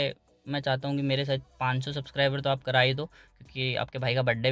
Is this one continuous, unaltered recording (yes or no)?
yes